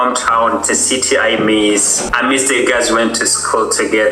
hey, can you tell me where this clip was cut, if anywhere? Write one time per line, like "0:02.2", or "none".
0:02.0